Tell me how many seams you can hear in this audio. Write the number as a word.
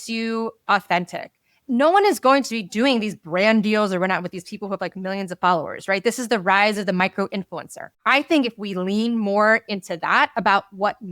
two